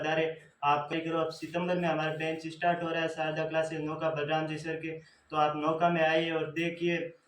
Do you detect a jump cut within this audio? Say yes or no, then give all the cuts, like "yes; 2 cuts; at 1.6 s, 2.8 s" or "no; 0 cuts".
yes; 1 cut; at 0.9 s